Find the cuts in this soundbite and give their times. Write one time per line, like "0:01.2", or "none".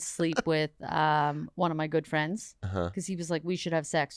none